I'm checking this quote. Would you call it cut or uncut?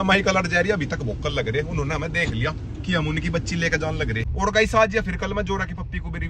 cut